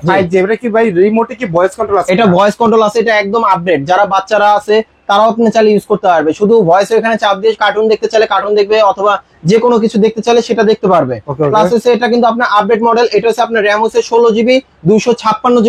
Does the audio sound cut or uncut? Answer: uncut